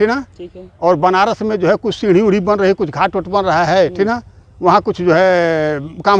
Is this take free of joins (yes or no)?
yes